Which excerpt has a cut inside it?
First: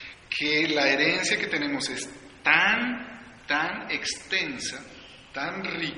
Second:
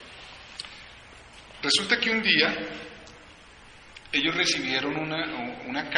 first; 1 cut; at 3.7 s

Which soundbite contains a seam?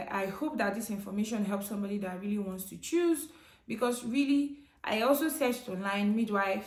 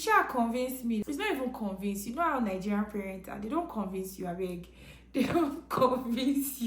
second; 1 cut; at 1.0 s

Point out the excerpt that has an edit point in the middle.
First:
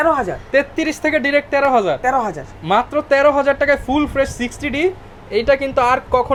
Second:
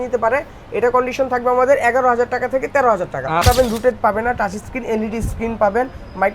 second; 1 cut; at 3.4 s

